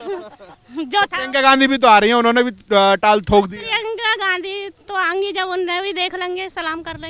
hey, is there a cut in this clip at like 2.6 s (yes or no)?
no